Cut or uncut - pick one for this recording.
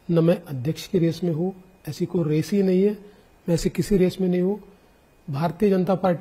uncut